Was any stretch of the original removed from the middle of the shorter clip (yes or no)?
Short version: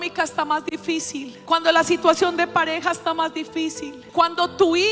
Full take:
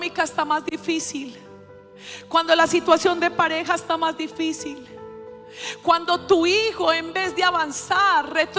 yes